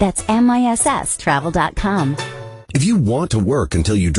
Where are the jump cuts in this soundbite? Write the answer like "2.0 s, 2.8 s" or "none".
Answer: 2.6 s